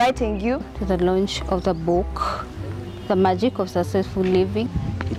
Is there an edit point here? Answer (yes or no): no